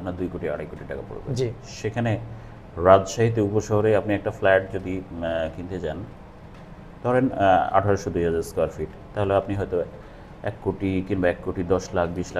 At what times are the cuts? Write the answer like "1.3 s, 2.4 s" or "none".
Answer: none